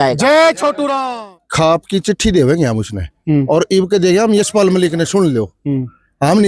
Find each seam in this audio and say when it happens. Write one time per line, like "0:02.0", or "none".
0:01.1

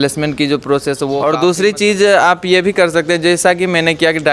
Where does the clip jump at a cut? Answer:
0:01.2

